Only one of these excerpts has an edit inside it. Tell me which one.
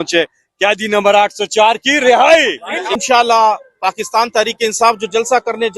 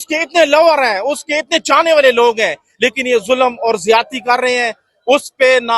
first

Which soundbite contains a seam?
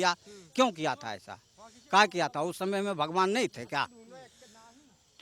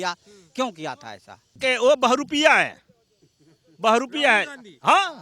second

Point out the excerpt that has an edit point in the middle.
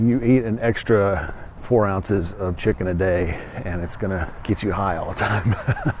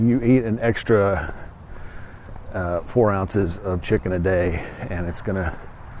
first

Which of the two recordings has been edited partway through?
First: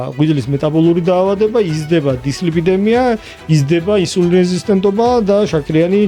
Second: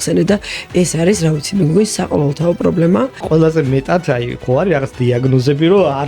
second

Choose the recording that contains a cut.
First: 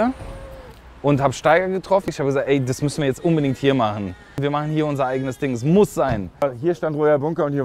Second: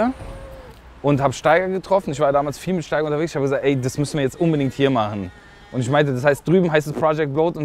first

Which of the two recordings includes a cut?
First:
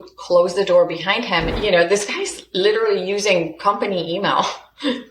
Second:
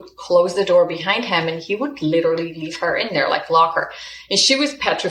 first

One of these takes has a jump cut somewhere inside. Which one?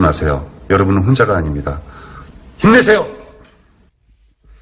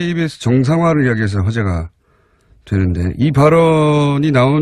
second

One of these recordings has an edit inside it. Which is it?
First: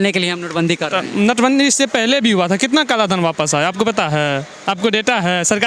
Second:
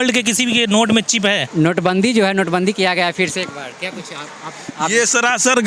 second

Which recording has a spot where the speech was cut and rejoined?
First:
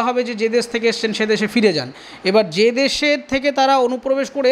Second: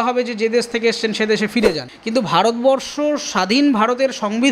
second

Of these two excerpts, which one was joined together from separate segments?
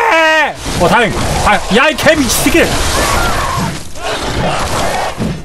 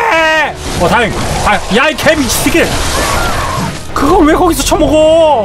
second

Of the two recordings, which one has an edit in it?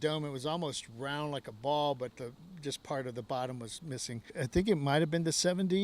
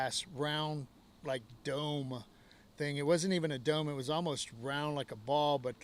first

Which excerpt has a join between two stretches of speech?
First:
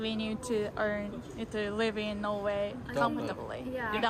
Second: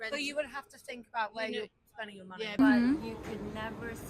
second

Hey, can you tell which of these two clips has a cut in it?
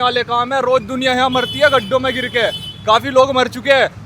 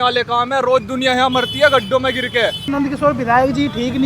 second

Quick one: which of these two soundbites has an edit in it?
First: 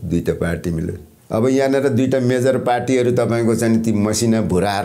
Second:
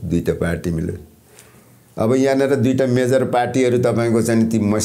first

